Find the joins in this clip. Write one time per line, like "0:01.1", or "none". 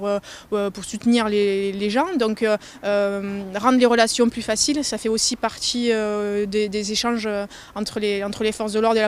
none